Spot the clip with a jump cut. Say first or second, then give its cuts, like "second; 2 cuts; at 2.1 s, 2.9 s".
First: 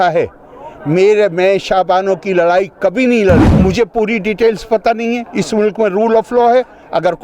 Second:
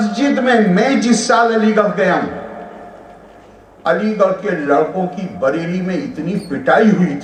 first; 1 cut; at 3.5 s